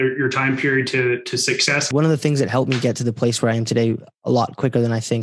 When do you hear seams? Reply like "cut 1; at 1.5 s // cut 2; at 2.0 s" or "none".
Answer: cut 1; at 1.9 s